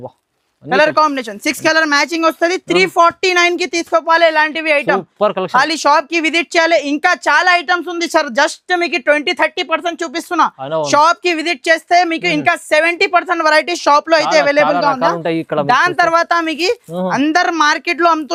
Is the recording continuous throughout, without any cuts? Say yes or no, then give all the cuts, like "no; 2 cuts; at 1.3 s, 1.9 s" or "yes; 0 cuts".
yes; 0 cuts